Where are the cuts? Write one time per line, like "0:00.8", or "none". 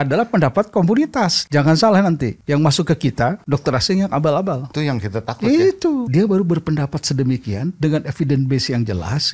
0:01.4
0:02.3
0:03.4
0:04.7
0:06.1